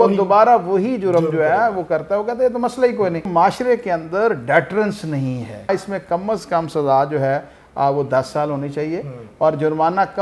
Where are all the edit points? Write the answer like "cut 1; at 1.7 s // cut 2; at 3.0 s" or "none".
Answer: cut 1; at 3.3 s // cut 2; at 5.7 s